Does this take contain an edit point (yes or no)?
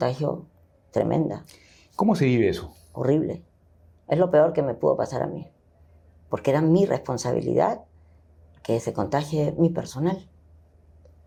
no